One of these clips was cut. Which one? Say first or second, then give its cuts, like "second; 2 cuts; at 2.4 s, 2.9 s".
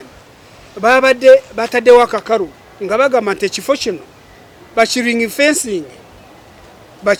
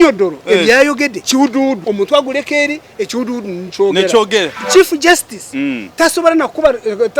second; 2 cuts; at 1.5 s, 4.6 s